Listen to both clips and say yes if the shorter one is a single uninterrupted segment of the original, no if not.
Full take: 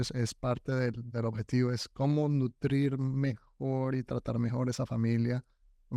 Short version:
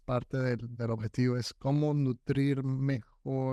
yes